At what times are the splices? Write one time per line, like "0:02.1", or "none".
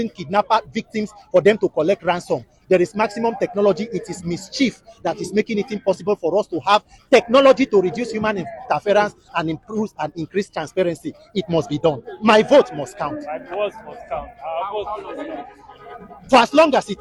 none